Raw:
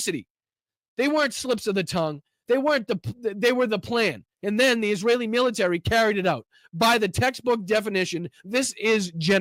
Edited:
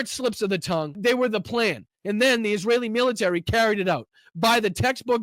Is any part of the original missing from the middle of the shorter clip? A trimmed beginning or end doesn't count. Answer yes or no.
yes